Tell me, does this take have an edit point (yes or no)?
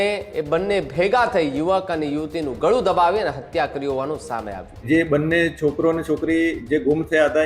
yes